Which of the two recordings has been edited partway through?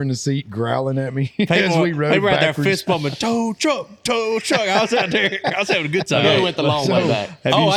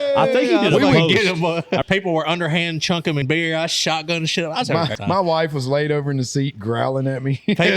second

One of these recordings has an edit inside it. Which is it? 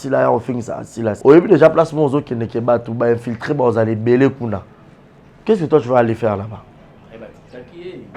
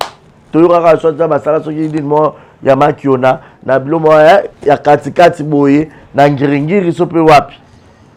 first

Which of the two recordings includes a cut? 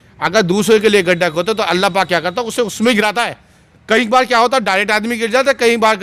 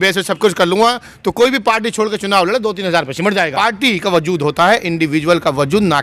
second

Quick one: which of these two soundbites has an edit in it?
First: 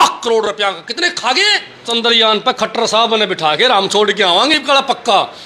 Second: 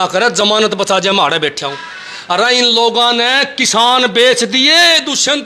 first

